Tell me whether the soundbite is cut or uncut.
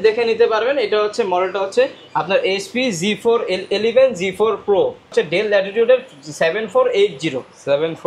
cut